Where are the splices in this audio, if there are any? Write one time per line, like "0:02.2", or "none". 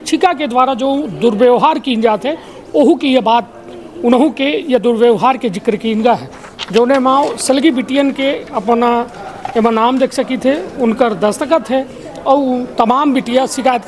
none